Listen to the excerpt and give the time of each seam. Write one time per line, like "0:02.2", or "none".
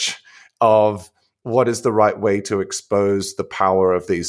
none